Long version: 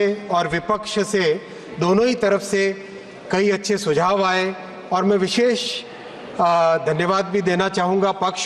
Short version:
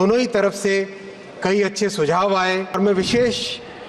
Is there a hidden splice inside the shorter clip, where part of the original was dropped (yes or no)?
yes